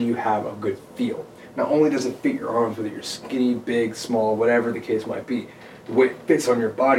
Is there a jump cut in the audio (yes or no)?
no